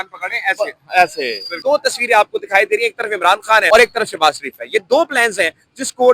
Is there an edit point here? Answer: yes; 2 cuts; at 1.6 s, 3.6 s

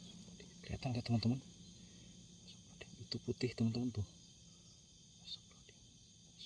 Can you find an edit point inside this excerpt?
no; 0 cuts

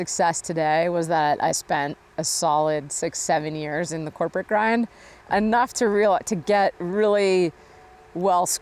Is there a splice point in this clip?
no; 0 cuts

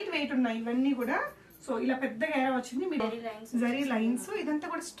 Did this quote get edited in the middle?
yes; 1 cut; at 3.0 s

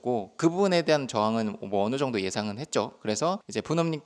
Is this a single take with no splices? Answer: yes; 0 cuts

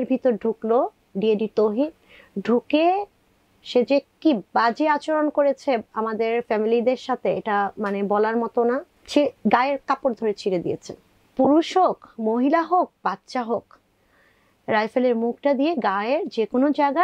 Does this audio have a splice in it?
yes; 2 cuts; at 9.0 s, 11.1 s

